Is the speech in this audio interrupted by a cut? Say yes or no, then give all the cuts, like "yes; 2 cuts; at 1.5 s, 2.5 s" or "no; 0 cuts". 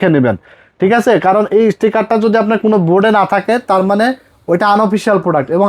no; 0 cuts